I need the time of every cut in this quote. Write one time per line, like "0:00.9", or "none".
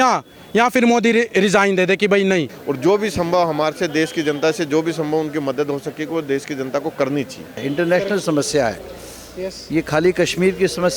0:02.5
0:07.6